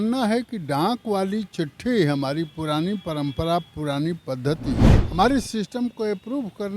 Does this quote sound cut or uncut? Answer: cut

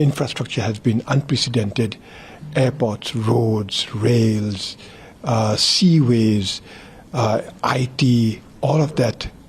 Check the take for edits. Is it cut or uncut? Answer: uncut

